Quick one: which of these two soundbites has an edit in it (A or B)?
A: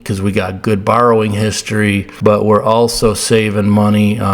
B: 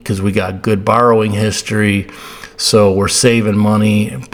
A